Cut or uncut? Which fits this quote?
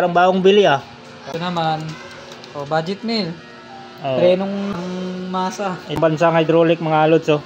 cut